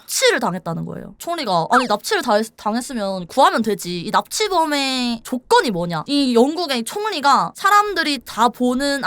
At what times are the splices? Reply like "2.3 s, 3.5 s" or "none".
1.1 s, 6.0 s